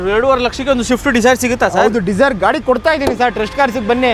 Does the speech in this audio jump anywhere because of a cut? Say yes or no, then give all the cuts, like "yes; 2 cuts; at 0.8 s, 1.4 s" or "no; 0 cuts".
no; 0 cuts